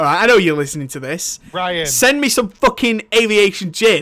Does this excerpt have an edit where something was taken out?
no; 0 cuts

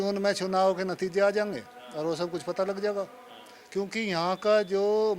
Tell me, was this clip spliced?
no; 0 cuts

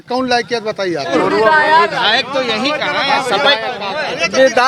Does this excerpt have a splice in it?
yes; 1 cut; at 1.1 s

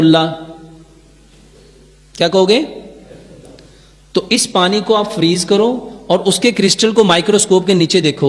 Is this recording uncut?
yes; 0 cuts

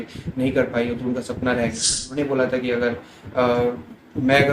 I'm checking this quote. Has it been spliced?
yes; 1 cut; at 2.1 s

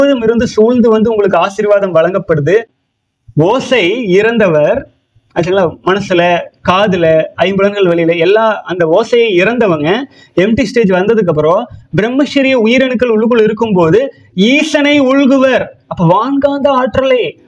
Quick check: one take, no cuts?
no; 1 cut; at 2.8 s

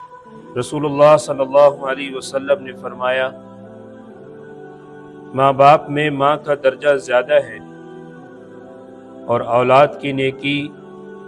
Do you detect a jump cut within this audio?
yes; 4 cuts; at 3.7 s, 5.3 s, 7.5 s, 9.3 s

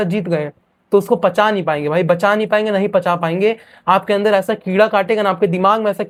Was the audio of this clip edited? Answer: no; 0 cuts

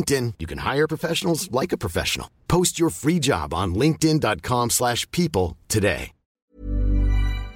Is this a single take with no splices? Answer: no; 1 cut; at 6.5 s

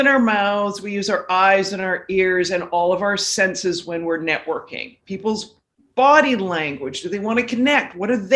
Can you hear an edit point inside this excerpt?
no; 0 cuts

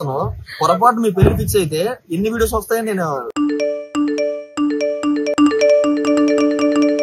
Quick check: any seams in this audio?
no; 0 cuts

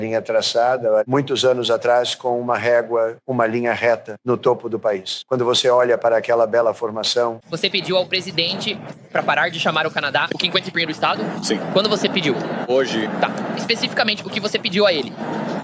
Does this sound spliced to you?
yes; 3 cuts; at 1.1 s, 7.4 s, 12.7 s

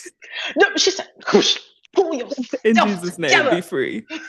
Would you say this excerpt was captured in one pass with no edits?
yes; 0 cuts

